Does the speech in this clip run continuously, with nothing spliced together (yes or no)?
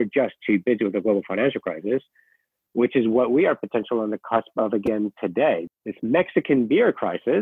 no